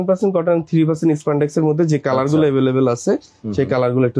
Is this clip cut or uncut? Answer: uncut